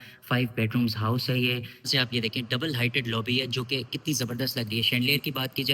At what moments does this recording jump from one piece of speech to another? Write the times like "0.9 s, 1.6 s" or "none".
1.9 s